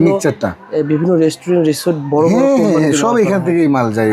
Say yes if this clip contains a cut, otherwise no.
no